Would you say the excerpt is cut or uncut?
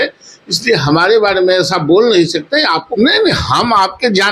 cut